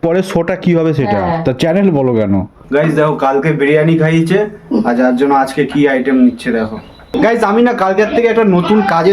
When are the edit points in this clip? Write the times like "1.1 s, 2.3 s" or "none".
2.6 s, 7.1 s